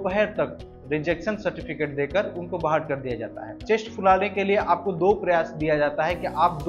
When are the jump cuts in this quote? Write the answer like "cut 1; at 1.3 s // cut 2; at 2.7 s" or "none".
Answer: cut 1; at 3.6 s

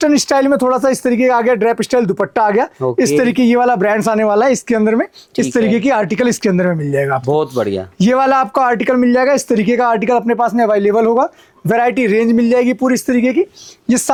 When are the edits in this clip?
none

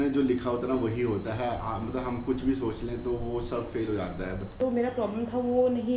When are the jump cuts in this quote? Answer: cut 1; at 4.6 s

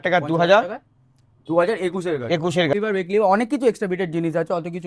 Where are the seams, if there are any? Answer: cut 1; at 2.7 s

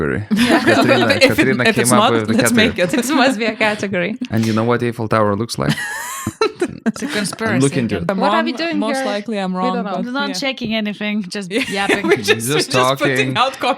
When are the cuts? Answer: cut 1; at 8.1 s

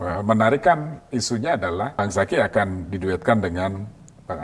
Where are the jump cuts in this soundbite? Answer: cut 1; at 2.0 s

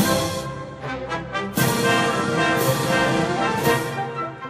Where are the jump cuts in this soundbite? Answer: none

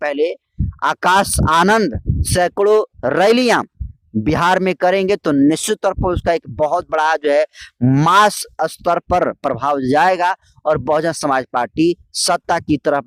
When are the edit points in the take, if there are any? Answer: none

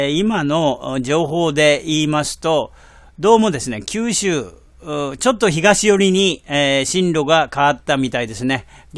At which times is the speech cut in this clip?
cut 1; at 6.9 s

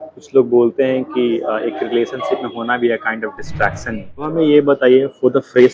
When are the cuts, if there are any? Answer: cut 1; at 4.3 s

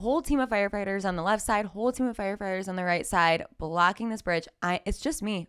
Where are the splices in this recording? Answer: none

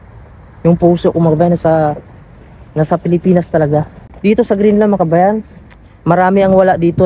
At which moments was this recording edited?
cut 1; at 4.0 s

